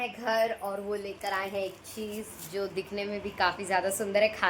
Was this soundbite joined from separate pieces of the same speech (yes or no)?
no